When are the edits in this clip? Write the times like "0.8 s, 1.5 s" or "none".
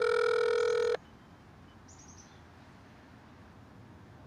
0.9 s

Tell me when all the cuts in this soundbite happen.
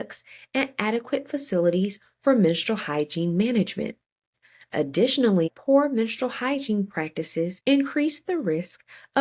5.5 s, 7.6 s

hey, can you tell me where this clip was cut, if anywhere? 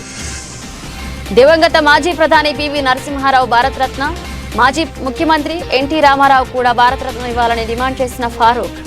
none

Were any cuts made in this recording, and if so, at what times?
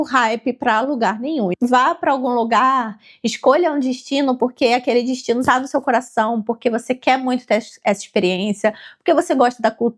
1.5 s

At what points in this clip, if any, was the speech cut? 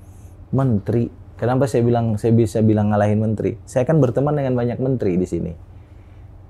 none

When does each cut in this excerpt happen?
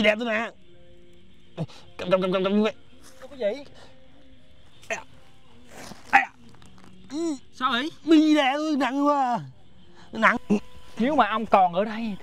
10.4 s

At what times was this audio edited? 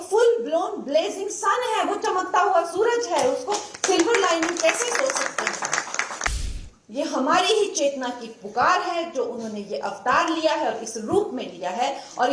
6.4 s

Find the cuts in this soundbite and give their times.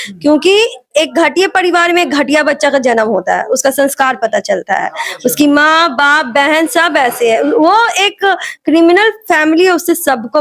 none

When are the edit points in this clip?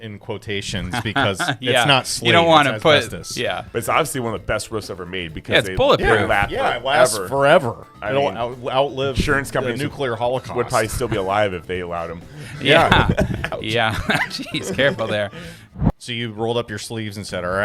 15.6 s

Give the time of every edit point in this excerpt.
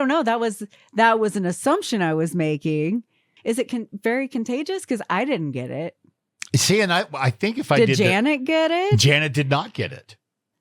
3.3 s

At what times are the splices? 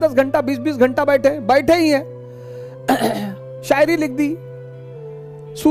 none

